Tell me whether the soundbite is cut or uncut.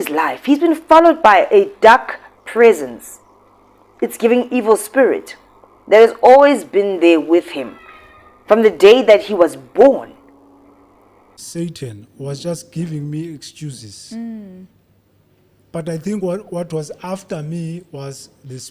cut